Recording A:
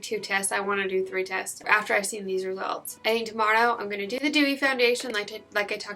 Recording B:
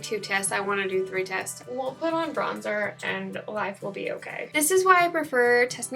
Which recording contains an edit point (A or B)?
B